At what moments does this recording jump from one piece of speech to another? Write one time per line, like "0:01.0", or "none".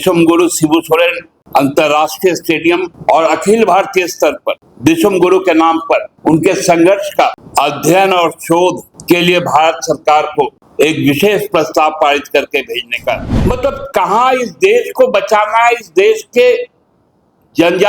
0:01.3
0:02.9
0:04.7
0:06.1
0:07.4
0:08.9
0:10.6
0:13.3